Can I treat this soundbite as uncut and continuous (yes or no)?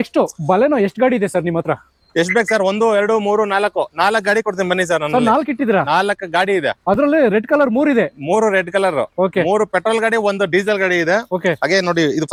yes